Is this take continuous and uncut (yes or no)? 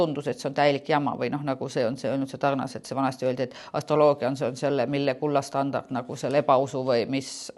yes